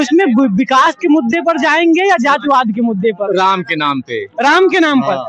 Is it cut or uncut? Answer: uncut